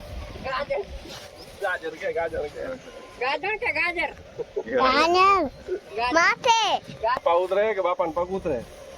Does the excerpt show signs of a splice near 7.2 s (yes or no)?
yes